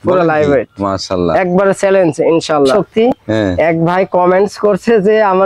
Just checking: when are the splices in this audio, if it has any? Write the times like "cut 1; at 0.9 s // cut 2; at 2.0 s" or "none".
cut 1; at 2.7 s

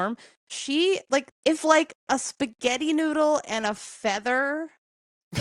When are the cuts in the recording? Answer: cut 1; at 1.3 s

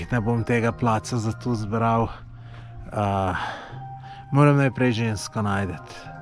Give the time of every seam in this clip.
none

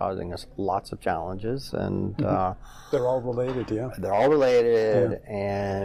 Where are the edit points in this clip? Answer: none

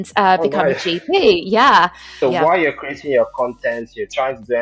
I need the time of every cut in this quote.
cut 1; at 2.0 s

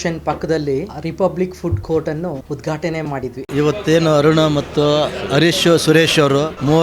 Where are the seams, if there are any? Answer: cut 1; at 0.9 s // cut 2; at 2.4 s // cut 3; at 3.4 s

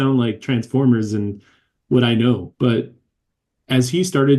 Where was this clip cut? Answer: cut 1; at 2.5 s

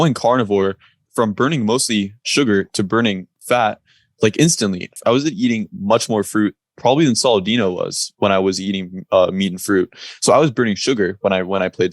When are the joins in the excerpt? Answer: cut 1; at 1.0 s // cut 2; at 2.2 s // cut 3; at 3.3 s // cut 4; at 4.9 s

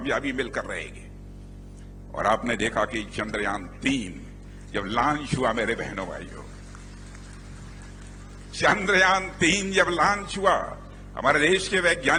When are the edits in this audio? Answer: none

